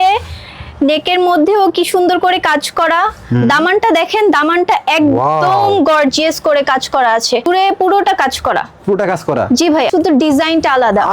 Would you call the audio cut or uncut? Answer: cut